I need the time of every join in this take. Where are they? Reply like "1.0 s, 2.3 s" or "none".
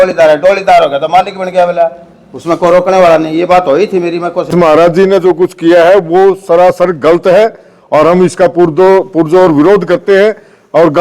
4.5 s